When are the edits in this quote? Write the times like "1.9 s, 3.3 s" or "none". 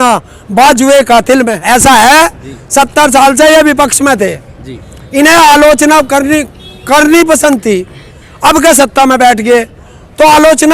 1.6 s